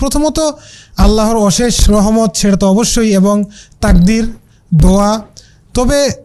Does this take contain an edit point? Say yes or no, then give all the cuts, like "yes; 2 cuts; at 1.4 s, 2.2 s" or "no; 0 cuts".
no; 0 cuts